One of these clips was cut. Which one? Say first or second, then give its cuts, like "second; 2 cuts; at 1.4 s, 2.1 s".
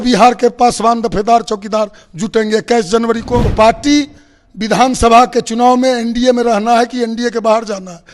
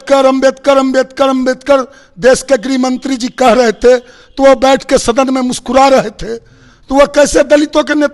first; 1 cut; at 3.5 s